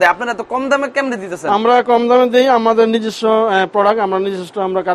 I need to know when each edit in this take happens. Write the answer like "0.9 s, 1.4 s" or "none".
none